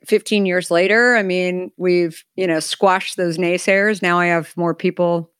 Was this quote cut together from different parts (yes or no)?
yes